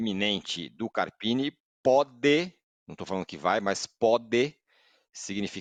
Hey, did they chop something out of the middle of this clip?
no; 0 cuts

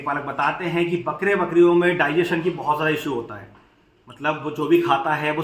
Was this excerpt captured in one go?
yes; 0 cuts

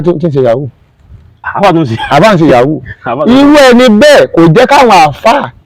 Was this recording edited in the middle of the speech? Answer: no; 0 cuts

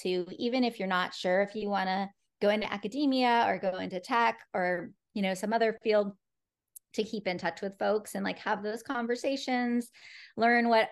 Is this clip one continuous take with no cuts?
yes; 0 cuts

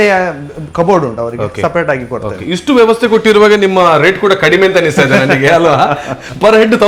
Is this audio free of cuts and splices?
yes; 0 cuts

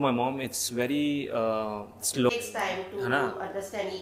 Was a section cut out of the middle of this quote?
yes; 1 cut; at 2.3 s

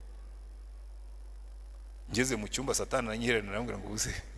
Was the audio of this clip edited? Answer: no; 0 cuts

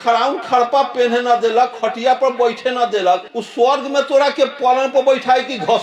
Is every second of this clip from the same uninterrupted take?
yes; 0 cuts

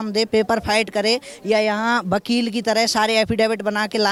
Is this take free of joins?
yes; 0 cuts

